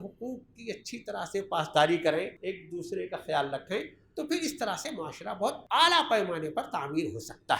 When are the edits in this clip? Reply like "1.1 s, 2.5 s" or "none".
2.4 s, 5.6 s